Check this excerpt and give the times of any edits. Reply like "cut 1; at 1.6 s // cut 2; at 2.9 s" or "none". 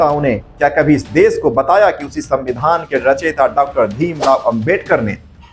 none